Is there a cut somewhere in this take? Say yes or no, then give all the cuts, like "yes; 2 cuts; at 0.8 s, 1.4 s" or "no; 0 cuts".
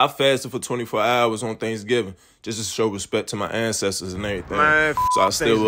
no; 0 cuts